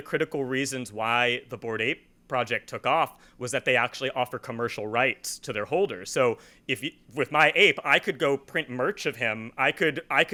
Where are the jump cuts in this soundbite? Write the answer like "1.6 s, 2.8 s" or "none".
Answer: none